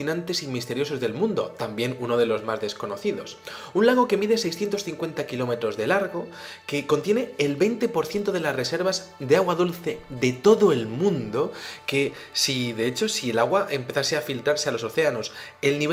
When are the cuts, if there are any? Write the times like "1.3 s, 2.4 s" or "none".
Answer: none

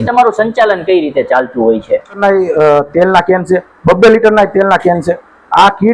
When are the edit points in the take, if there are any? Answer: 2.2 s

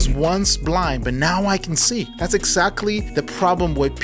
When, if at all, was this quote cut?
2.1 s, 3.1 s

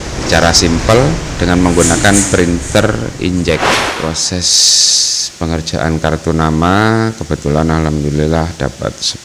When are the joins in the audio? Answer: 3.9 s

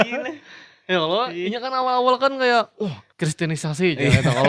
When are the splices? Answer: 3.0 s

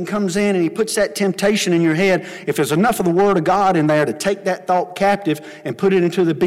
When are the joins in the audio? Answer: none

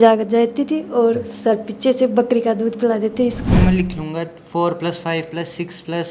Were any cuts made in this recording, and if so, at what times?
3.5 s

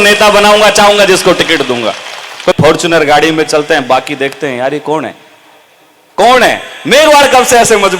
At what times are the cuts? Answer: 2.6 s

